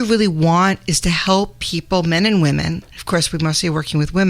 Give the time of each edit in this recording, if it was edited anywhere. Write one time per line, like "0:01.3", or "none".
0:02.9